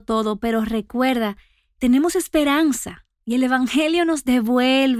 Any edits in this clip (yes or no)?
yes